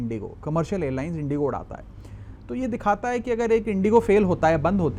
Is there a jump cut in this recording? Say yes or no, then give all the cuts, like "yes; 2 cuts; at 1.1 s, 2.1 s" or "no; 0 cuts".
no; 0 cuts